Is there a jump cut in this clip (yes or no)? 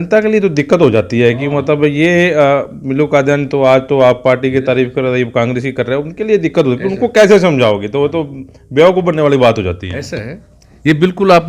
no